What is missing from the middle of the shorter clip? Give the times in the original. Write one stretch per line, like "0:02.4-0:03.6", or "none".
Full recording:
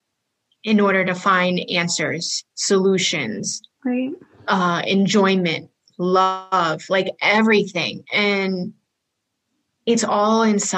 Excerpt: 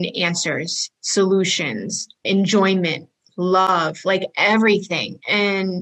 0:03.7-0:04.8
0:06.3-0:06.5